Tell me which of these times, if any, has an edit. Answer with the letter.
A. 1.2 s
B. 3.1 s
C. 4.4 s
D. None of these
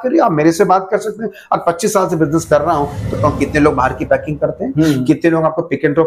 B